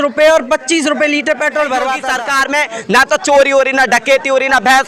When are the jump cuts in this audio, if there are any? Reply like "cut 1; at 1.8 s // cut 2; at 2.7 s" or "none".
cut 1; at 2.1 s